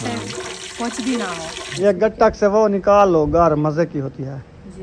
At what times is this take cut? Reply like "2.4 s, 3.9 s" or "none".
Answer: 1.8 s

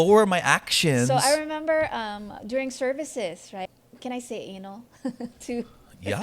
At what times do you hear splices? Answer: 3.6 s

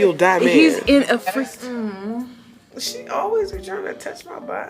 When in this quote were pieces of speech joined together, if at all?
1.3 s

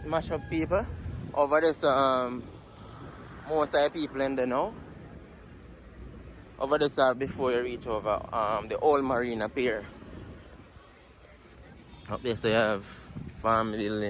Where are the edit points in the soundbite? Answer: none

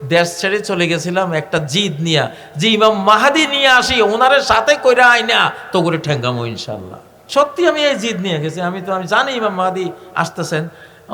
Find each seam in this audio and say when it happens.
7.1 s

